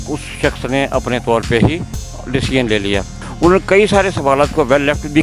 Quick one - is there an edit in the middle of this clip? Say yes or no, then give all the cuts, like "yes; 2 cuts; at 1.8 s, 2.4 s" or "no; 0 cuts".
yes; 1 cut; at 3.2 s